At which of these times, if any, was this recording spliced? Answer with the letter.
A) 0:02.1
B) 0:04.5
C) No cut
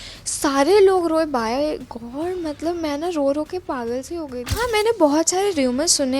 B